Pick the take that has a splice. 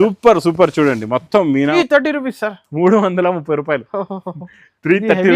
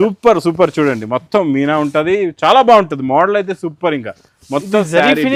first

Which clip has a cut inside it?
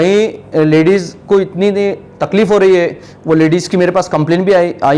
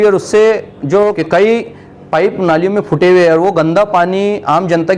second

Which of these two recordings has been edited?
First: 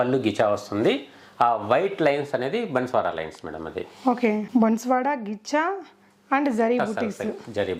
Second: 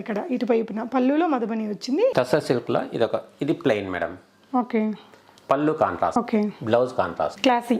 second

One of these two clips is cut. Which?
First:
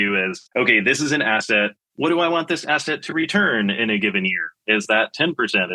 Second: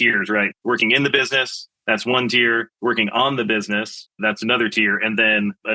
first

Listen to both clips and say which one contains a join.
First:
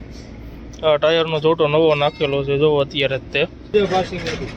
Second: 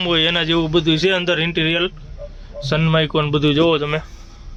first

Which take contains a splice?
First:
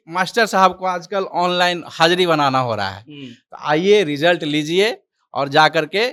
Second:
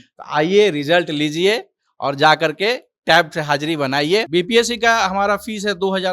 second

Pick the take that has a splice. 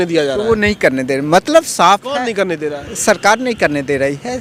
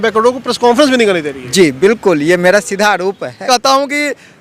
second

